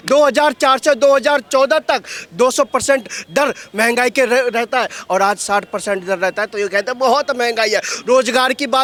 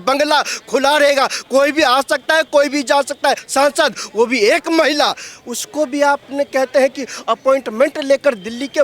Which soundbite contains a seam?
second; 1 cut; at 3.4 s

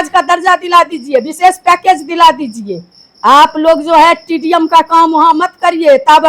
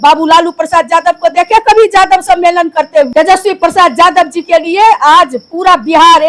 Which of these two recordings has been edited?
second; 1 cut; at 3.1 s

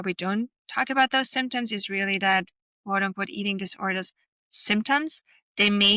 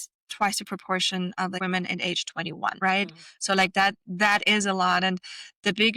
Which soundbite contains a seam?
second; 2 cuts; at 1.6 s, 2.8 s

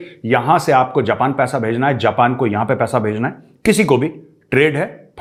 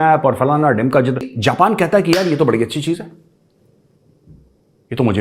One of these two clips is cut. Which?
second; 1 cut; at 1.3 s

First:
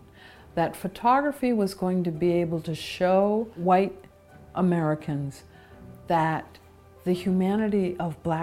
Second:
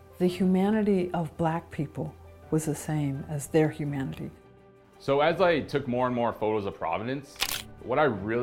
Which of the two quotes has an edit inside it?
second; 1 cut; at 4.5 s

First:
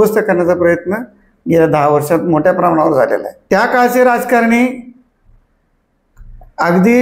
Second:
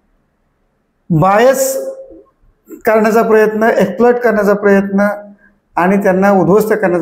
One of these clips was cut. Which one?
first; 1 cut; at 3.3 s

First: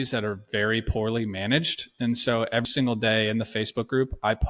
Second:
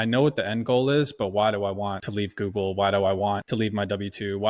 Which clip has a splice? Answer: second; 2 cuts; at 2.0 s, 3.4 s

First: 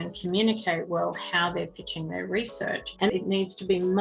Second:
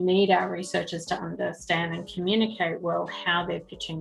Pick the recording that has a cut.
first; 1 cut; at 3.0 s

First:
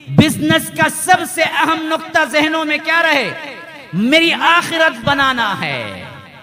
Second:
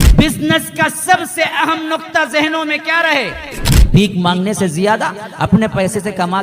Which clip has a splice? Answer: second; 1 cut; at 3.7 s

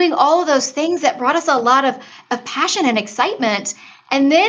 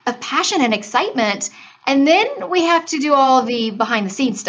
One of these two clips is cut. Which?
second; 1 cut; at 3.3 s

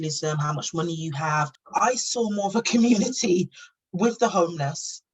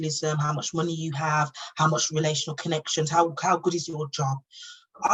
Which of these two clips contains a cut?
first; 1 cut; at 1.6 s

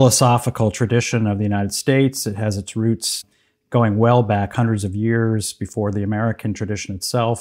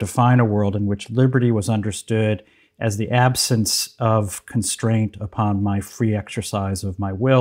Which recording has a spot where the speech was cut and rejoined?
first; 1 cut; at 3.3 s

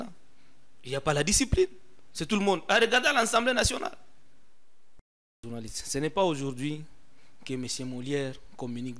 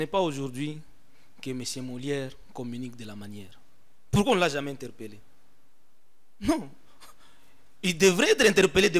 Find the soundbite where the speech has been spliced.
first; 1 cut; at 5.1 s

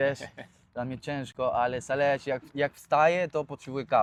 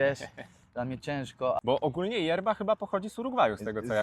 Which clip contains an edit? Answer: second; 1 cut; at 1.3 s

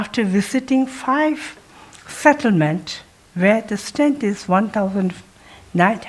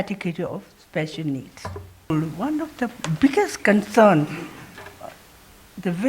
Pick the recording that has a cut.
second; 1 cut; at 2.1 s

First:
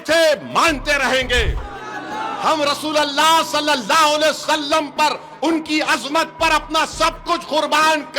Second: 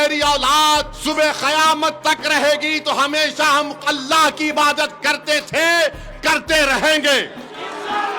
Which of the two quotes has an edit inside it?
second; 1 cut; at 0.9 s

